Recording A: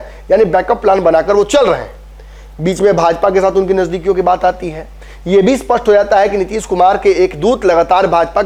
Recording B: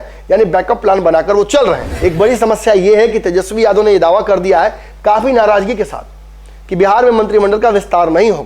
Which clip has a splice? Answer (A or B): B